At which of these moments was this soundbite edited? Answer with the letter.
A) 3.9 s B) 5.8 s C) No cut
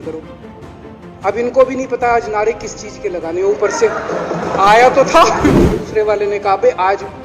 B